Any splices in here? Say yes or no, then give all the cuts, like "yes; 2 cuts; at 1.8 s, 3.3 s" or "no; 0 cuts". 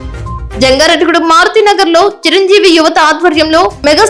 no; 0 cuts